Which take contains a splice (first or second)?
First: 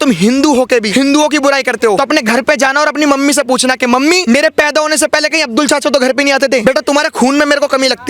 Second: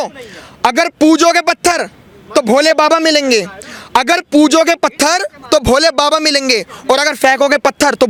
first